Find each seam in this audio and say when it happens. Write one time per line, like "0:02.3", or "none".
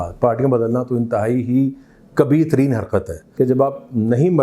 0:03.2